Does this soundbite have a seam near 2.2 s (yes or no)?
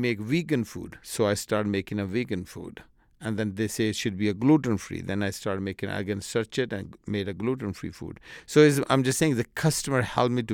no